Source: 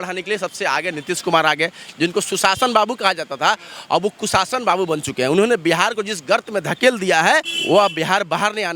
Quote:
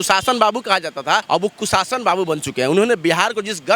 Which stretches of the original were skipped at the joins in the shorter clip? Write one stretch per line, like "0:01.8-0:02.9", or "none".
0:03.6-0:03.8